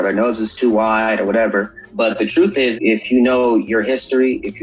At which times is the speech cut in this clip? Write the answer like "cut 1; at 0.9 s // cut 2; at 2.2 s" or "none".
cut 1; at 1.8 s // cut 2; at 2.7 s

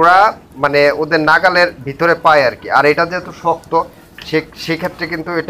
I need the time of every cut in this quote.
none

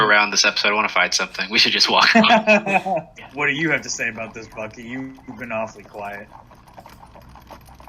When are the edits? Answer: cut 1; at 3.2 s

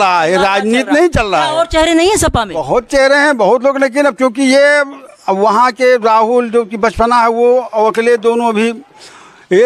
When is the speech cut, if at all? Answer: none

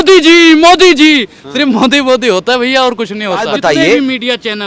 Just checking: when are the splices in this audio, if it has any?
cut 1; at 3.5 s

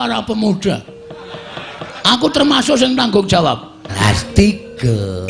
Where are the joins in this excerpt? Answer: cut 1; at 3.9 s

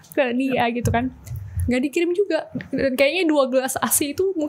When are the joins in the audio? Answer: none

